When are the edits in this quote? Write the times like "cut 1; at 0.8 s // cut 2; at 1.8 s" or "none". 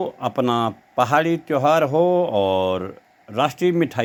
none